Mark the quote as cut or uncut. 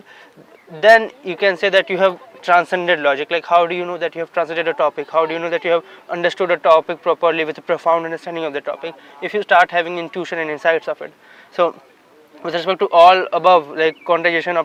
uncut